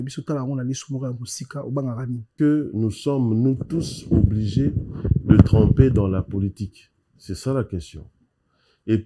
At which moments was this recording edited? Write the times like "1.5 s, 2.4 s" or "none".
2.3 s